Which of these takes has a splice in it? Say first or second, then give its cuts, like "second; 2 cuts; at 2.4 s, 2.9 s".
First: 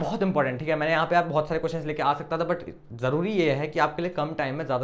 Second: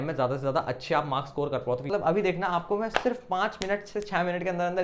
second; 1 cut; at 1.9 s